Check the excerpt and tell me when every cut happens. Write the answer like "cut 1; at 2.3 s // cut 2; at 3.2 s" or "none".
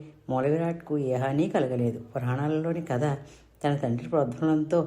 cut 1; at 2.2 s